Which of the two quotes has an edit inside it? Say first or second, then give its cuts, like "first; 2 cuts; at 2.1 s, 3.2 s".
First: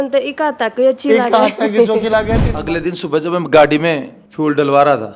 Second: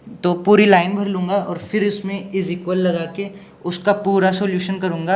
first; 1 cut; at 2.4 s